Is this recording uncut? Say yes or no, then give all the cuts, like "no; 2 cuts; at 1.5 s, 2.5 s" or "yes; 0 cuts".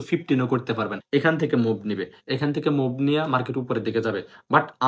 no; 1 cut; at 1.0 s